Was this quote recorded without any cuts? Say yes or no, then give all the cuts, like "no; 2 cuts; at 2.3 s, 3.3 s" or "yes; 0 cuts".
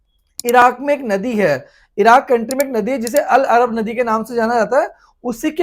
yes; 0 cuts